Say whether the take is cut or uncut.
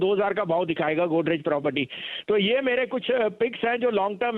uncut